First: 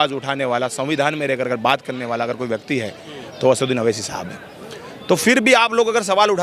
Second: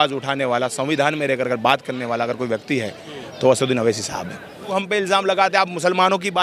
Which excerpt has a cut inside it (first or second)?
second